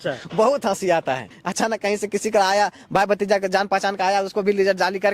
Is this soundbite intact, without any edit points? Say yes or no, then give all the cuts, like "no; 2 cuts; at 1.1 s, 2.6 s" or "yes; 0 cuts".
no; 1 cut; at 1.4 s